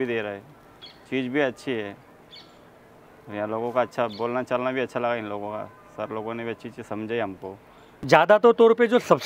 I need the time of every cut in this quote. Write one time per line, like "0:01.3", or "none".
0:08.0

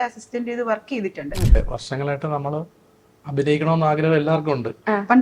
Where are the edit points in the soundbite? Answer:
0:01.6

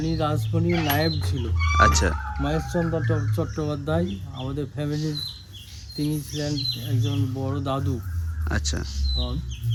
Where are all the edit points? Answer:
none

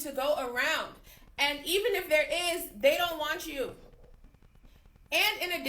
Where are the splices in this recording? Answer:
0:02.2

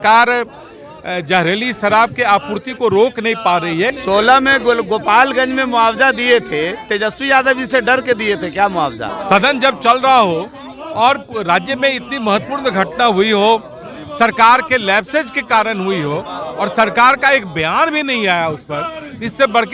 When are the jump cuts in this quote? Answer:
0:04.0
0:09.1

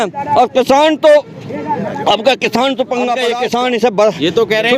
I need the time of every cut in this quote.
0:03.2

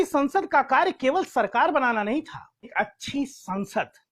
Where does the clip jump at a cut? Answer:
0:02.7

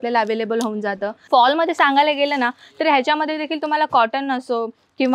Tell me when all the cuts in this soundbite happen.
0:01.2

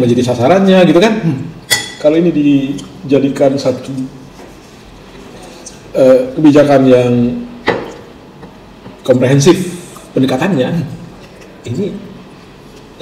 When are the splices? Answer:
none

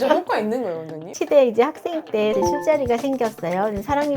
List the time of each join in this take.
0:01.1
0:02.3

